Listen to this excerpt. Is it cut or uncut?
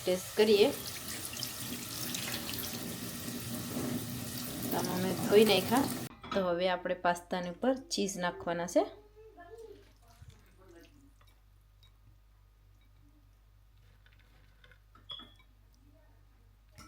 cut